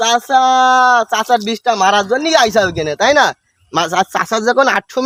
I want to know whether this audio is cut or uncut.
uncut